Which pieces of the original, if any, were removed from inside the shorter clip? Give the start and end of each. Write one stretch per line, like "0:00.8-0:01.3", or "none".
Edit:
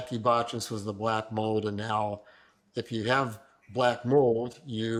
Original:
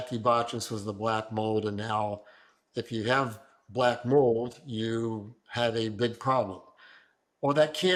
none